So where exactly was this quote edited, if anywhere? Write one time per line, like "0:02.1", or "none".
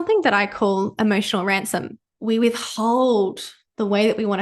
0:02.0